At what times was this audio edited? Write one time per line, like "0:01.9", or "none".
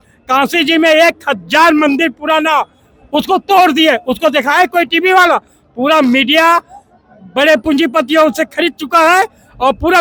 none